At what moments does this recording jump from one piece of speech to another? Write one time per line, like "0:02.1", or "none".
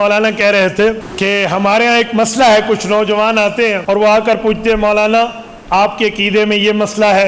0:01.1
0:03.8